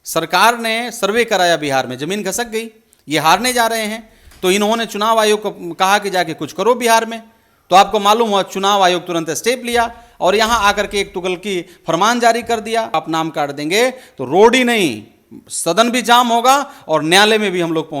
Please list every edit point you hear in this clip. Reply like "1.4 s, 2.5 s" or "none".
12.9 s

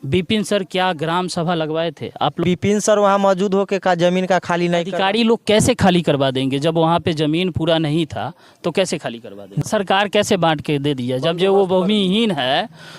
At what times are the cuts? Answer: 2.4 s, 9.5 s

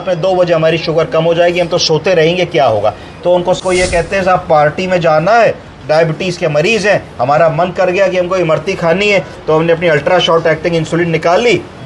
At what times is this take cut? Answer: 3.6 s

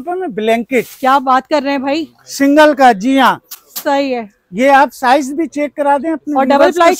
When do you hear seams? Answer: none

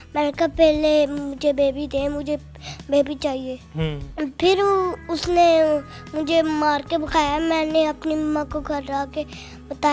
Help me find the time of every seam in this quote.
none

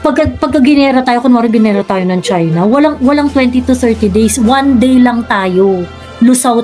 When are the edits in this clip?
none

